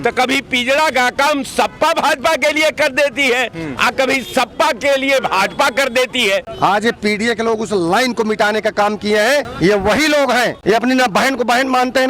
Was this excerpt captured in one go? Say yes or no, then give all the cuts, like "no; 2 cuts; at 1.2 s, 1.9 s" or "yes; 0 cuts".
no; 3 cuts; at 6.5 s, 9.5 s, 10.6 s